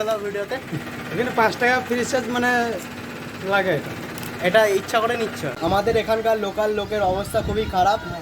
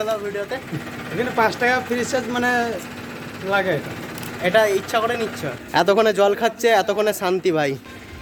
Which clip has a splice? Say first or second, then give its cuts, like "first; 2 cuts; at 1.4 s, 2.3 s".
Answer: first; 1 cut; at 5.5 s